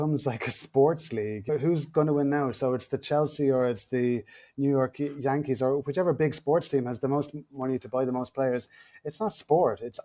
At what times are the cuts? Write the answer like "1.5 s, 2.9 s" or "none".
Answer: none